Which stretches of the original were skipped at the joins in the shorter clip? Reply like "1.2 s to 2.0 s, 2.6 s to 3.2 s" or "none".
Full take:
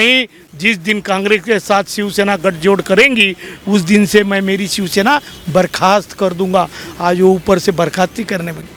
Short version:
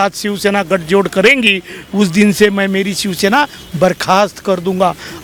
none